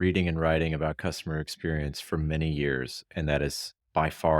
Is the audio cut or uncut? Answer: uncut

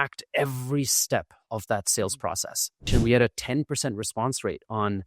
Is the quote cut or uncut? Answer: cut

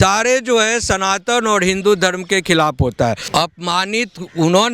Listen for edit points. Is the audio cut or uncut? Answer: cut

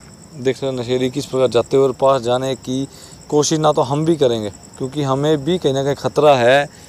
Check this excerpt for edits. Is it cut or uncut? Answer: uncut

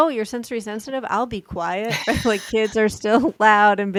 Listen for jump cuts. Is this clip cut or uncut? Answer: uncut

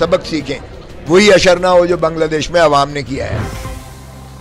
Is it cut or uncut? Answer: cut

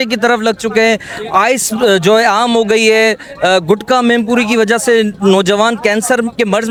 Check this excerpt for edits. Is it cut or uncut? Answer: uncut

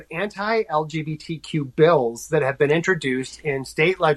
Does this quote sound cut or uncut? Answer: uncut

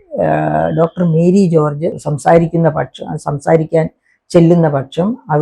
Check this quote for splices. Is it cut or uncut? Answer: cut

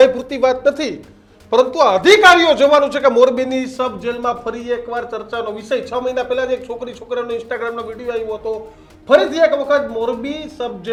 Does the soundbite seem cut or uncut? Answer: uncut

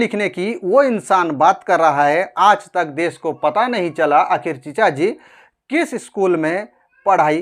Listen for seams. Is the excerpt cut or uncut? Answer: uncut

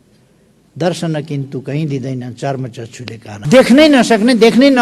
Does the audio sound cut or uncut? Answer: cut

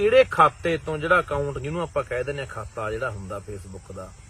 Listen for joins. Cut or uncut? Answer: uncut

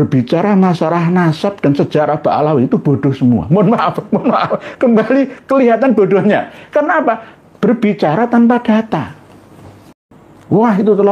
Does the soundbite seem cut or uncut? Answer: cut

